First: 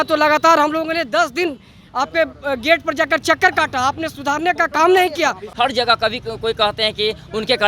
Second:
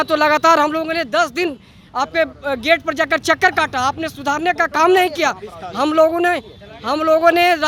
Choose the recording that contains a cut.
first; 1 cut; at 5.5 s

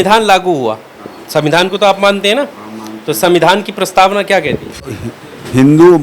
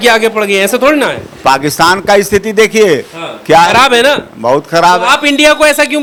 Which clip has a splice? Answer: first; 1 cut; at 4.8 s

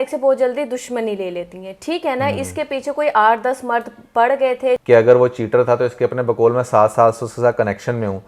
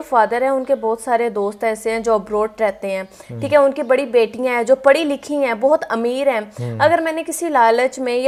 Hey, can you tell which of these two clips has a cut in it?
first; 1 cut; at 4.8 s

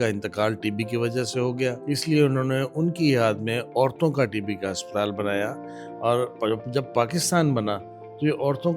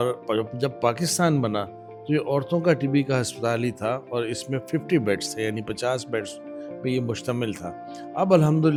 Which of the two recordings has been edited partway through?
first; 1 cut; at 1.8 s

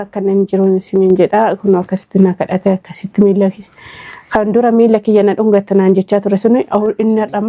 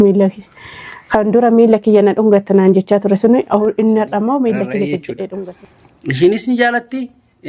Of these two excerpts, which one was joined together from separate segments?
second; 1 cut; at 5.7 s

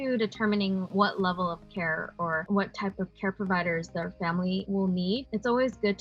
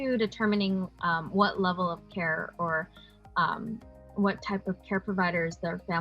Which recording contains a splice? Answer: first; 3 cuts; at 0.9 s, 2.4 s, 4.9 s

